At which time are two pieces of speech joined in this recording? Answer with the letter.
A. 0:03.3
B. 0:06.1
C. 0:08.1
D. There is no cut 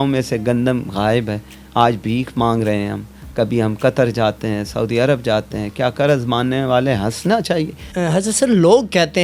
C